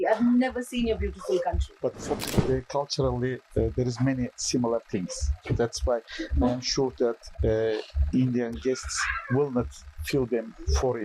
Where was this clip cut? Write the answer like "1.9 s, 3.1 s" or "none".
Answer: 2.1 s